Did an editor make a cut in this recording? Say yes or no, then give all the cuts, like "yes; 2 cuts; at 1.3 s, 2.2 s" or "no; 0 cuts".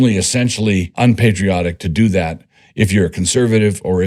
yes; 1 cut; at 0.9 s